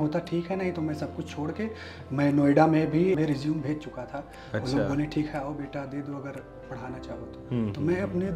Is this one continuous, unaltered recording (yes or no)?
yes